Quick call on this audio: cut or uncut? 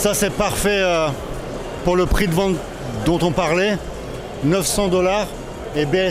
uncut